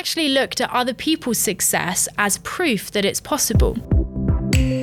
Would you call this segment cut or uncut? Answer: cut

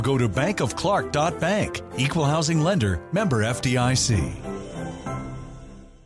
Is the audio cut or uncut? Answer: uncut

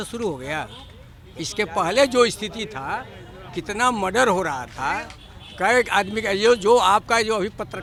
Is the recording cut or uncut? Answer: uncut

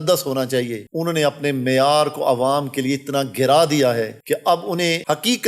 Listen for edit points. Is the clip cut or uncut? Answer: uncut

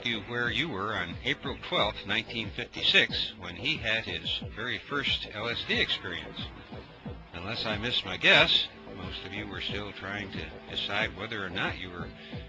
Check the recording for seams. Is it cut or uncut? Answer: uncut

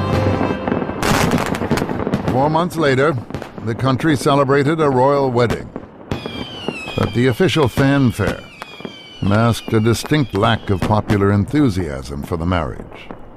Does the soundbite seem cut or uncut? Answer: cut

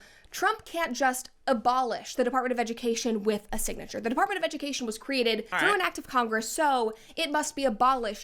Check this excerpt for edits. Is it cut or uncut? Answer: cut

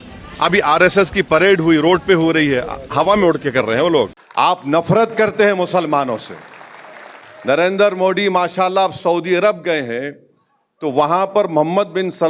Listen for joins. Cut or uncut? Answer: cut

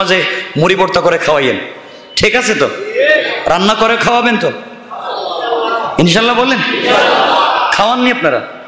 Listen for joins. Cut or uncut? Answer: uncut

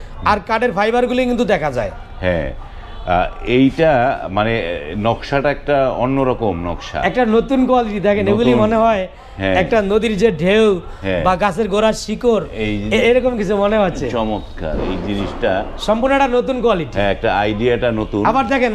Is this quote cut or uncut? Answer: uncut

